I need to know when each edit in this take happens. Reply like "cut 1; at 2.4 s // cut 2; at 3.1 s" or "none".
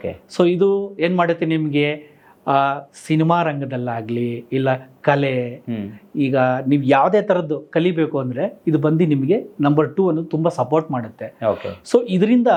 none

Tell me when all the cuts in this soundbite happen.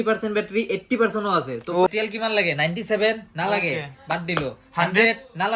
cut 1; at 1.9 s

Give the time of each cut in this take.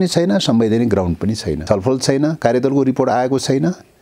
cut 1; at 1.5 s

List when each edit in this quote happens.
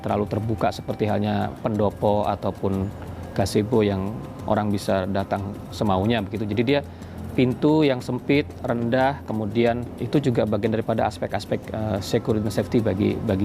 cut 1; at 10.0 s

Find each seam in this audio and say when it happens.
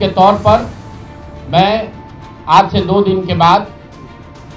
none

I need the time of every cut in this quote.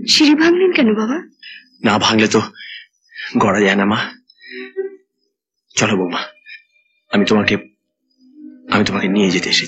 none

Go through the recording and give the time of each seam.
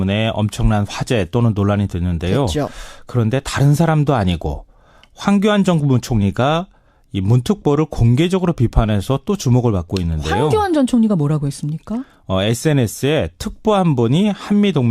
cut 1; at 6.1 s

